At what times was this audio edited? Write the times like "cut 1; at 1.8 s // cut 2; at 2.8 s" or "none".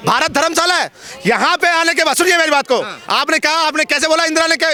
none

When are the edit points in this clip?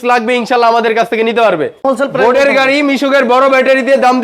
cut 1; at 1.8 s

